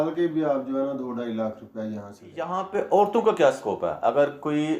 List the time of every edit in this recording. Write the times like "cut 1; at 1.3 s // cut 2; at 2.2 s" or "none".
cut 1; at 2.6 s